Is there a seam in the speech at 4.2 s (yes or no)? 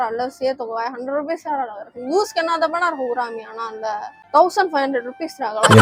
yes